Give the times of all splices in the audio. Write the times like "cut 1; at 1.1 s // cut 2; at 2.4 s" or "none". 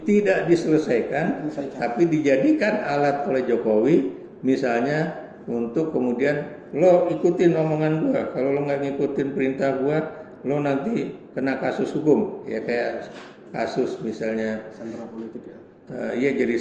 none